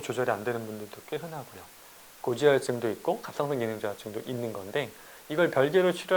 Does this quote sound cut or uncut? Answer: cut